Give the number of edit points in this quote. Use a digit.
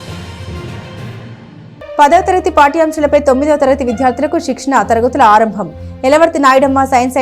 1